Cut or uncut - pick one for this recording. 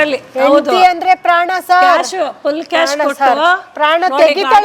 uncut